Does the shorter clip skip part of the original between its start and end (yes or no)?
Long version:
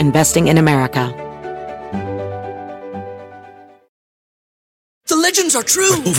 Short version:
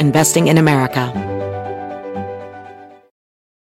yes